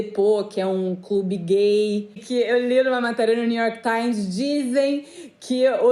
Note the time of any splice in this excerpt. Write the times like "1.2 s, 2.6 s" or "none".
2.2 s

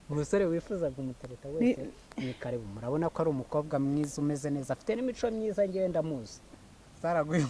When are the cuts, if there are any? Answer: 6.4 s

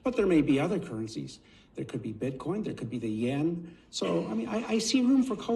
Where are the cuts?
none

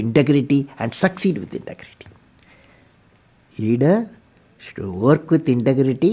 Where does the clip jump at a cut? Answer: none

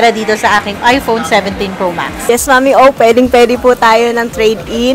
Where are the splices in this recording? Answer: 2.2 s

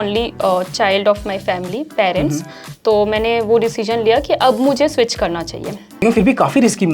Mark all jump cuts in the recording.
6.0 s

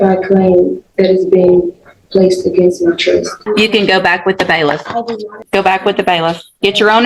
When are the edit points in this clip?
3.4 s, 5.4 s

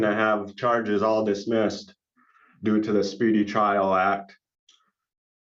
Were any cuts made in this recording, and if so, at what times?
none

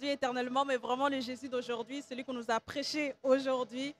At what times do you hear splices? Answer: none

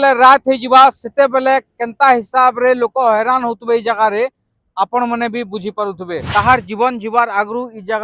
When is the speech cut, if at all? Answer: 6.2 s

